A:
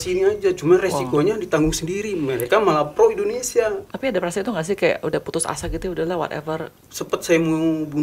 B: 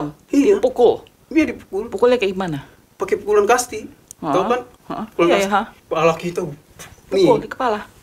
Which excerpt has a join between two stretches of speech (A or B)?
A